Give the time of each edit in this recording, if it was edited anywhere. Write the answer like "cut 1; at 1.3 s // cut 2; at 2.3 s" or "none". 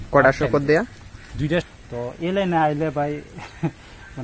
cut 1; at 1.7 s